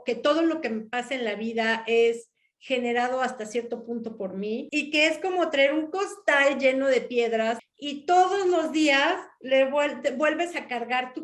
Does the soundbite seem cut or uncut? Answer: cut